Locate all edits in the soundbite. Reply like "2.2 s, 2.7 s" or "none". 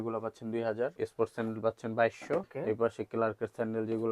0.9 s, 2.5 s